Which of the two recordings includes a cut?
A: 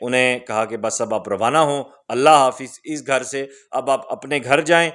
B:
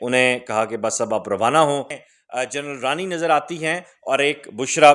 B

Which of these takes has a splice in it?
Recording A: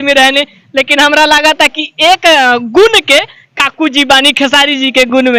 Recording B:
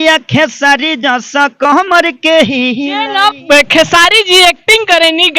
B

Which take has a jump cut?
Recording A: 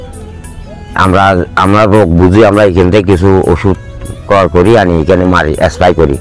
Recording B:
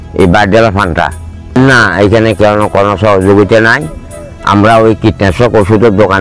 B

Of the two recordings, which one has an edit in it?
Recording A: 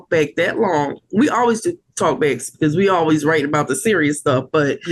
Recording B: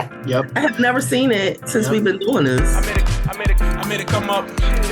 B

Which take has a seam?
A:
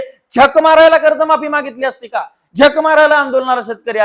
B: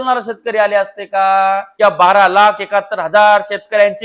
B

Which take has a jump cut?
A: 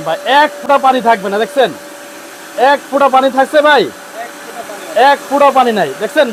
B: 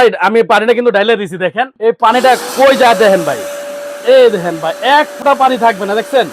B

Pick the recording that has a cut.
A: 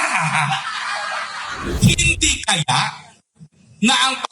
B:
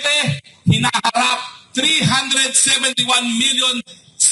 A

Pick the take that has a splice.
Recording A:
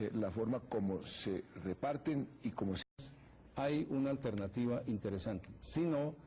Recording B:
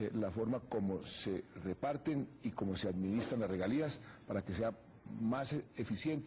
B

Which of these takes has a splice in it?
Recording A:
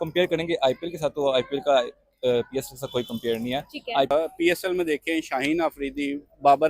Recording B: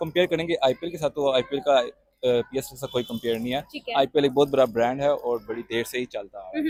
A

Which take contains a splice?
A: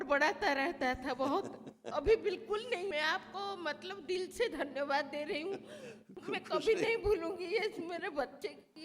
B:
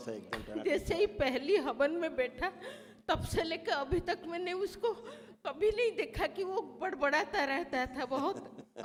A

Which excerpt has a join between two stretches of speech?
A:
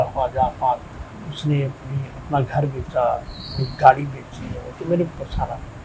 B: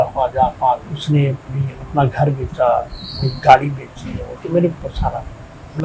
B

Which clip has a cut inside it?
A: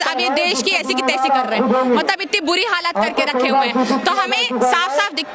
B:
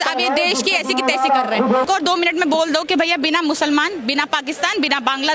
B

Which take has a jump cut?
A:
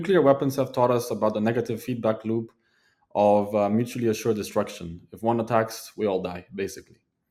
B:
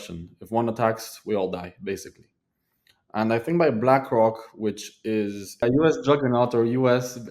B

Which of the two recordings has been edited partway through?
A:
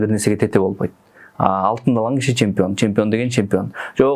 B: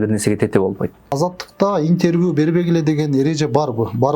B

